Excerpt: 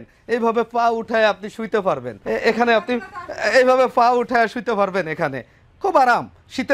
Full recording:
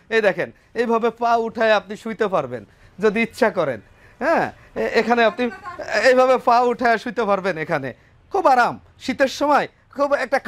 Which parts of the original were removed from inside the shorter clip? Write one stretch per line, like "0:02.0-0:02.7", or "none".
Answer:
0:02.6-0:04.6